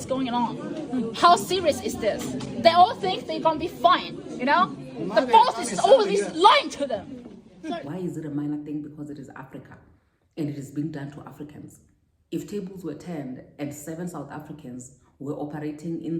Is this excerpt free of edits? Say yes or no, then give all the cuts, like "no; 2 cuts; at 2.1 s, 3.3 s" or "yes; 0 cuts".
no; 1 cut; at 7.8 s